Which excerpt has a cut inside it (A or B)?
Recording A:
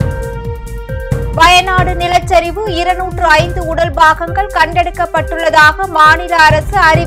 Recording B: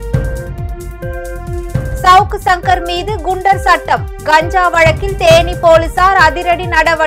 A